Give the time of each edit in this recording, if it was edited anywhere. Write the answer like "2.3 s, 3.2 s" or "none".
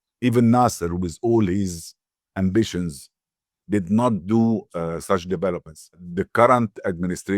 6.0 s

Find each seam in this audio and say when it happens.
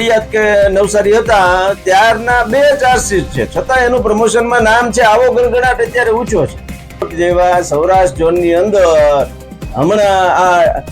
7.1 s

